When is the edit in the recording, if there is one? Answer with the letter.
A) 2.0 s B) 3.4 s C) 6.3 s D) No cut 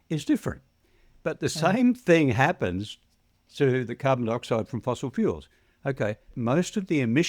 C